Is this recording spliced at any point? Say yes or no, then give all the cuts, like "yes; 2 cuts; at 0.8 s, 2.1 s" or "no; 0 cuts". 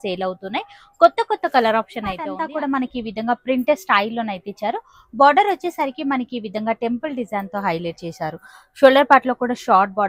yes; 1 cut; at 2.2 s